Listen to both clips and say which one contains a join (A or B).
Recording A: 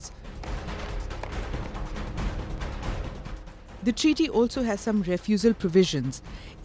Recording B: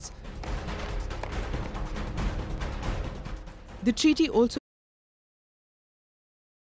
A